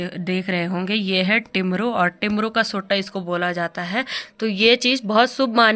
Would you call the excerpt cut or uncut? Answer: uncut